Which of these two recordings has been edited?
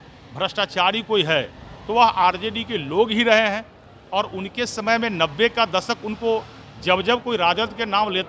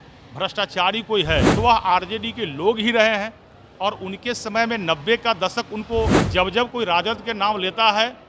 second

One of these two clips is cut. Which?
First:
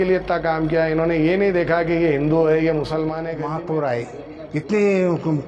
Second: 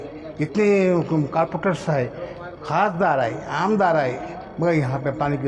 first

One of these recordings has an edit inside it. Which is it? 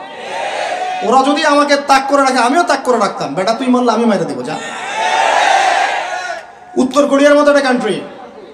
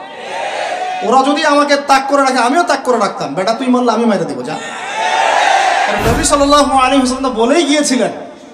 second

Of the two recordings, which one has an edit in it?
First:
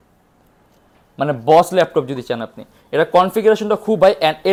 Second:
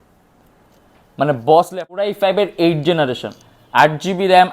second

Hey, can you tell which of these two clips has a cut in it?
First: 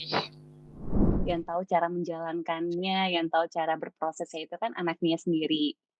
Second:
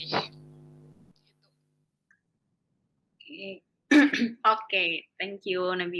first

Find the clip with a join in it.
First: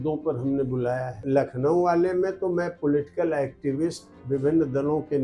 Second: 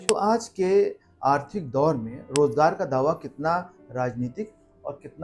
first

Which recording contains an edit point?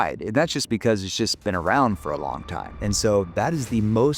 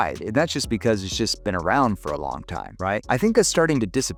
first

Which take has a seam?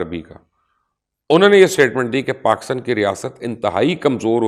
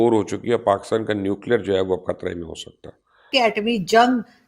second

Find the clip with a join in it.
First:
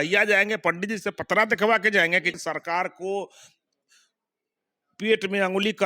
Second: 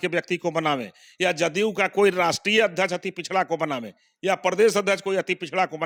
first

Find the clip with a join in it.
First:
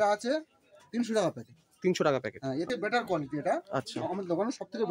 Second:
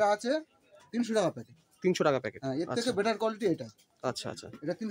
first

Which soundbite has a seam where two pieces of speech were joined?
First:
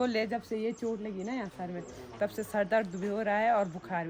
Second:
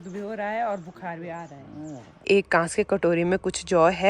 second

